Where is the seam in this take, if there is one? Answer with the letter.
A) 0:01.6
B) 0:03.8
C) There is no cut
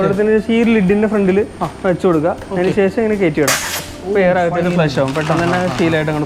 C